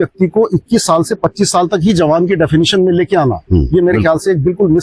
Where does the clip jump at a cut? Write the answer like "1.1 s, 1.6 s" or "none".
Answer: none